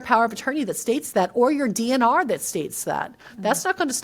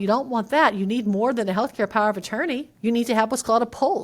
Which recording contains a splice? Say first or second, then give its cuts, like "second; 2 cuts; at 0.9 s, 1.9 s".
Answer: second; 1 cut; at 2.7 s